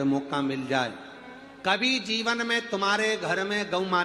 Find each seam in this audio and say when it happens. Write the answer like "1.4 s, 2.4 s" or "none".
2.2 s